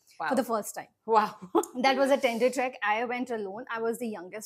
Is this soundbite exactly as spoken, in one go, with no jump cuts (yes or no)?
yes